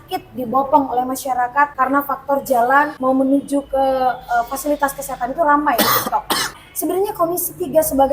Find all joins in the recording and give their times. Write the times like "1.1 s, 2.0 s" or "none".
1.7 s, 2.9 s, 6.6 s